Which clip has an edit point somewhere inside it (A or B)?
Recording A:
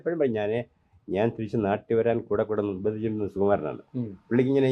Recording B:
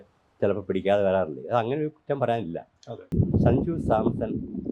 B